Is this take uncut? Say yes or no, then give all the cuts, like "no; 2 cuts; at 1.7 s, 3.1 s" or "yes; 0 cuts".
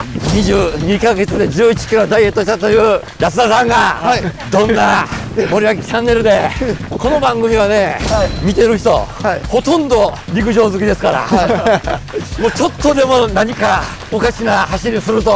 no; 8 cuts; at 3.1 s, 4.4 s, 5.2 s, 6.8 s, 8.4 s, 9.4 s, 10.2 s, 14.0 s